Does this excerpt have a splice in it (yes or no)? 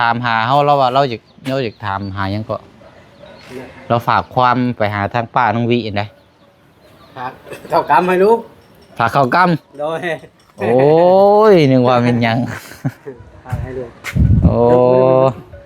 no